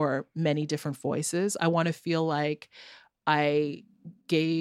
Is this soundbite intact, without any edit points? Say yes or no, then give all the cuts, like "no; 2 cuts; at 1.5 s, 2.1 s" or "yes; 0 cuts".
yes; 0 cuts